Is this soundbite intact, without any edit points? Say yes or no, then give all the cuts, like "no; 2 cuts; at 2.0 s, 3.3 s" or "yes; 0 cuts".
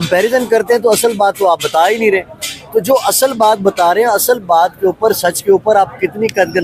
yes; 0 cuts